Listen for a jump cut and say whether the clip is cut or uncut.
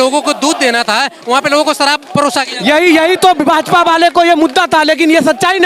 uncut